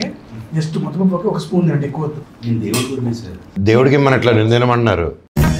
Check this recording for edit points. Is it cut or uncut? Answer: cut